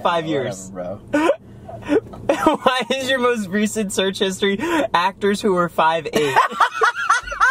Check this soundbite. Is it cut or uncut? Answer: uncut